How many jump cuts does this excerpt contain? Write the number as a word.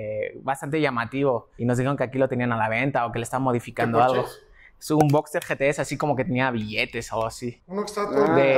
zero